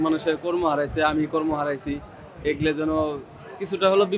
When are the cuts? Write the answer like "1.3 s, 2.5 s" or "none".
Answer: none